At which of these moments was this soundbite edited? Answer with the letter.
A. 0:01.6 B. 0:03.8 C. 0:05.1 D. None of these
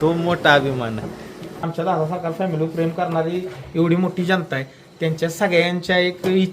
A